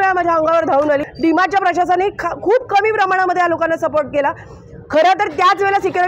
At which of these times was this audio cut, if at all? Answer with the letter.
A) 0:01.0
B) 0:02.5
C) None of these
A